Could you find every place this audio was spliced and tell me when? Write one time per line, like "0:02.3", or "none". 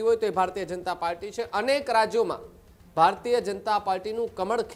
none